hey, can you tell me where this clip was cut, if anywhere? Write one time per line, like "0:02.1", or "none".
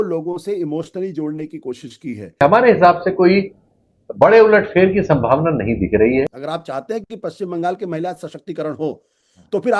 0:02.4
0:06.4